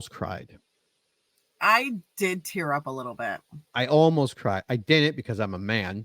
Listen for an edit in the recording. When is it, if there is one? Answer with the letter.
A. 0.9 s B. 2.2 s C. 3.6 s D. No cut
D